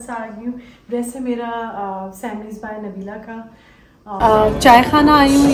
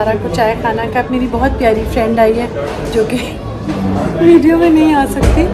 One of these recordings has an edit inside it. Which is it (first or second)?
first